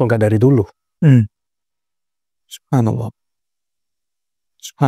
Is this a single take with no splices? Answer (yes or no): yes